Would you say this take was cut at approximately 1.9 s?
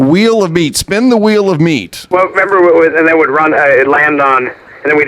yes; 1 cut; at 1.9 s

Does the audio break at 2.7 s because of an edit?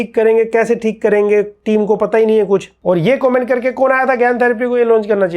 yes; 1 cut; at 2.7 s

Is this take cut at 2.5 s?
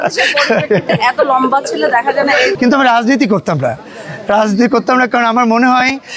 yes; 1 cut; at 2.5 s

